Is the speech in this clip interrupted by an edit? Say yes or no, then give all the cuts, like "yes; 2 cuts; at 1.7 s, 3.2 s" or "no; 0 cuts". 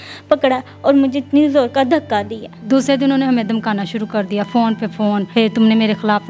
yes; 2 cuts; at 2.5 s, 5.3 s